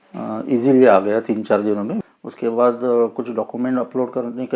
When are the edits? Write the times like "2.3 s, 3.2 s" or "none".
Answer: 2.2 s

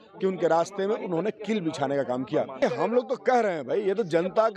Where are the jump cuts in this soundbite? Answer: 2.6 s

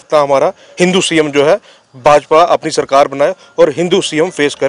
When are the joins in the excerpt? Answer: none

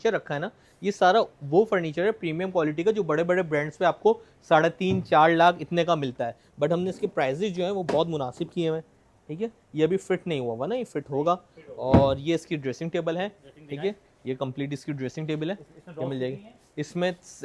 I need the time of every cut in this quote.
none

